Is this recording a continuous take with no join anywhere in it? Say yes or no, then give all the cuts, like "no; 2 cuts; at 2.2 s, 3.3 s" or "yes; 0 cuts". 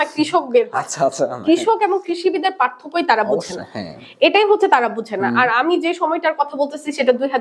yes; 0 cuts